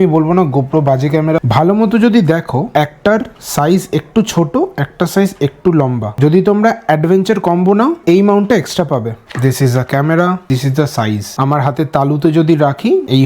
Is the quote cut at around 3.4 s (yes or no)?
no